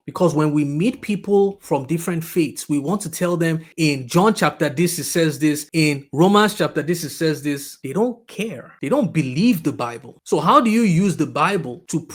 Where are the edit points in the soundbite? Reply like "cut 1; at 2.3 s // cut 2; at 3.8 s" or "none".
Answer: none